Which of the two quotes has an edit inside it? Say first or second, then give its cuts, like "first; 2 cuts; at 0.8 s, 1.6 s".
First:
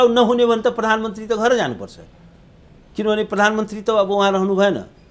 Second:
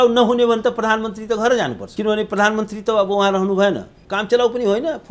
second; 2 cuts; at 1.8 s, 4.0 s